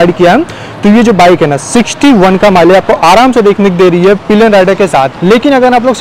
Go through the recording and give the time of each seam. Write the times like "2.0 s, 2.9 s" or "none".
none